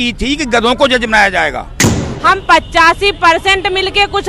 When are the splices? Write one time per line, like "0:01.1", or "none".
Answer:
0:01.9